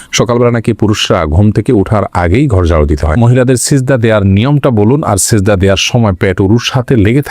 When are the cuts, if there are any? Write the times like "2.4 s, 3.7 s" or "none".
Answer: 3.1 s

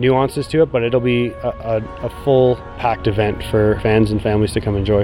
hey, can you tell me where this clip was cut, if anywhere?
2.8 s, 3.8 s

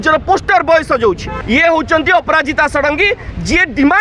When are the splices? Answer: 1.3 s

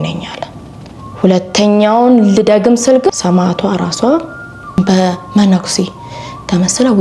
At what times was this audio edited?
3.1 s, 4.7 s

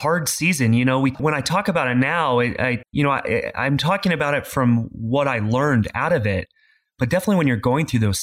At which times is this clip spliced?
1.2 s, 2.8 s

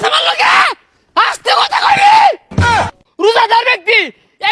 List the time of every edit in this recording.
2.8 s

